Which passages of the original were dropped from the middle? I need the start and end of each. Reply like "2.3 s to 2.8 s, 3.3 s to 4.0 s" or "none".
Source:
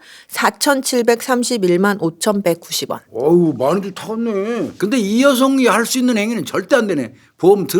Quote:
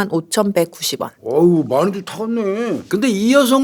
none